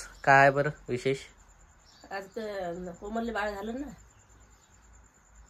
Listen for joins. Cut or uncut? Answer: uncut